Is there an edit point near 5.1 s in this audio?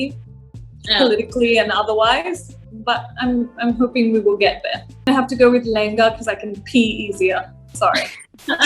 yes; 1 cut; at 5.1 s

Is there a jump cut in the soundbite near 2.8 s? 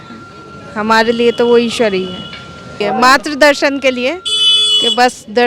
yes; 1 cut; at 2.8 s

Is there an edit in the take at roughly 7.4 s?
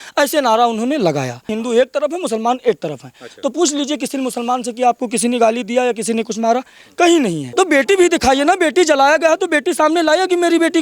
yes; 2 cuts; at 1.5 s, 7.4 s

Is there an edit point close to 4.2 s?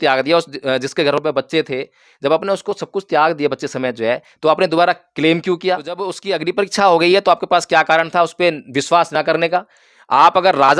no; 1 cut; at 6.2 s

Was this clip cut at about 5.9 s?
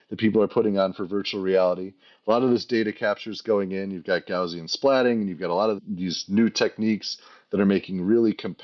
yes; 1 cut; at 5.9 s

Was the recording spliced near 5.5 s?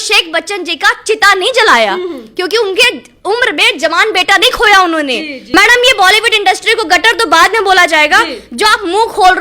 yes; 1 cut; at 5.5 s

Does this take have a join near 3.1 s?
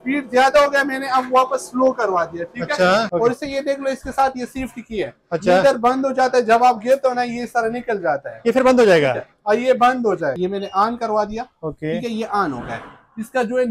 yes; 2 cuts; at 3.1 s, 10.4 s

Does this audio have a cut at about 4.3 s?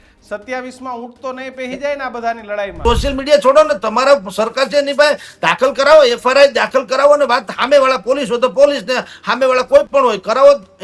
no; 1 cut; at 2.8 s

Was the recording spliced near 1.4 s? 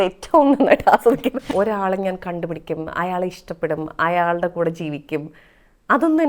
yes; 1 cut; at 1.4 s

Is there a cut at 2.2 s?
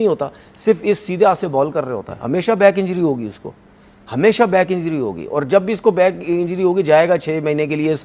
yes; 1 cut; at 2.2 s

